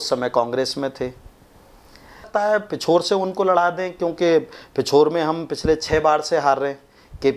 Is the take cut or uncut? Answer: cut